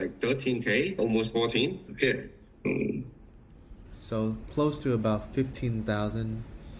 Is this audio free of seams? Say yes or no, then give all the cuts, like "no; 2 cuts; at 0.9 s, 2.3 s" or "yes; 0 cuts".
no; 1 cut; at 2.6 s